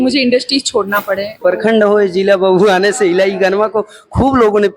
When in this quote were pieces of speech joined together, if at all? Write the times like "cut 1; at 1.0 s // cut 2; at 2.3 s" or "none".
cut 1; at 1.3 s